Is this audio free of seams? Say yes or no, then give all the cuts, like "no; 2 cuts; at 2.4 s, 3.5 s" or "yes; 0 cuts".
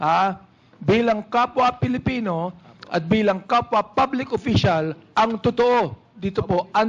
yes; 0 cuts